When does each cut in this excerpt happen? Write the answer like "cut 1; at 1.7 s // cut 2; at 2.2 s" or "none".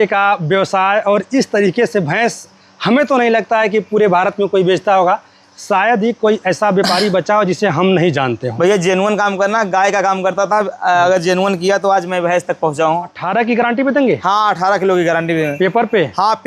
cut 1; at 13.2 s